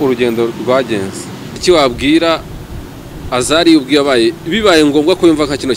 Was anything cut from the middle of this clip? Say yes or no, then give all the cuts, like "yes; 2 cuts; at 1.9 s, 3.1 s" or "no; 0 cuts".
yes; 1 cut; at 1.5 s